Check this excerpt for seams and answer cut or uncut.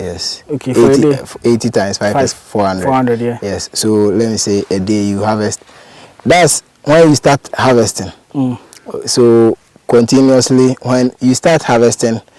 uncut